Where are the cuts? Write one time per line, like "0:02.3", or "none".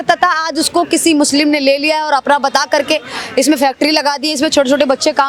none